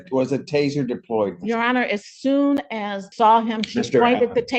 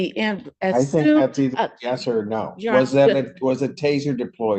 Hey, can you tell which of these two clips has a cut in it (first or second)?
first